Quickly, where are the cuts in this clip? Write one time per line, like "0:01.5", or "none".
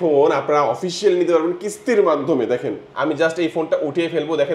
0:02.8